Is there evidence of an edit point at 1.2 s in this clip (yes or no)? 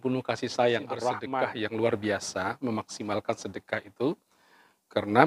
yes